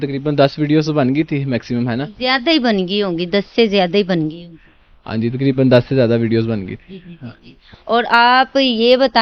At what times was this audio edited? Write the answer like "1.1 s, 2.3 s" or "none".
none